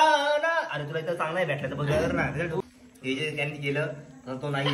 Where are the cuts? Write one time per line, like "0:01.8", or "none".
0:02.6